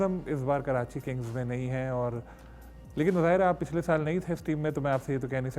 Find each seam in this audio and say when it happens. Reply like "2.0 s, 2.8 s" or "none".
none